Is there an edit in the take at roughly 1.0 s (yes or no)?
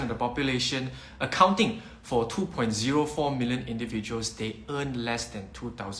no